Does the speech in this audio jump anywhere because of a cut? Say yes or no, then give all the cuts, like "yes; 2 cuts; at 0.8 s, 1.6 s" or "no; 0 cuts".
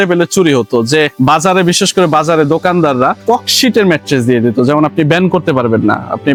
no; 0 cuts